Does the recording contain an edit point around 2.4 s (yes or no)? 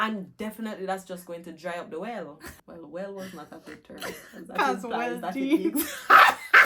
yes